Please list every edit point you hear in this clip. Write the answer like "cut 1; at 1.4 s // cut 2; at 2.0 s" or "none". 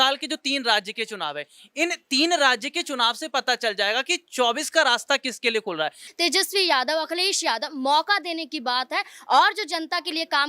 cut 1; at 6.1 s